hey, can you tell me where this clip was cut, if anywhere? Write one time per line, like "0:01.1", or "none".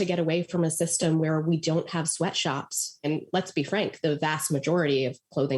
0:03.0